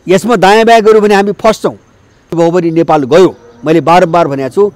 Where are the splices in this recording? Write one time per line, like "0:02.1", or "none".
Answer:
0:02.3